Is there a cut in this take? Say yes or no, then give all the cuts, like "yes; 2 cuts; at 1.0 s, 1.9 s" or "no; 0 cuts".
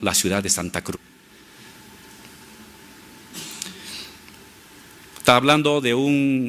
no; 0 cuts